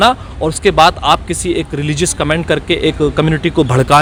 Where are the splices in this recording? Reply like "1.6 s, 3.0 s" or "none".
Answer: none